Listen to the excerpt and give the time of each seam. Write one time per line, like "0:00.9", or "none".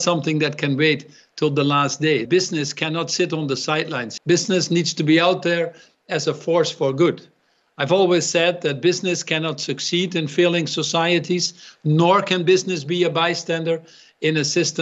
0:02.2
0:04.0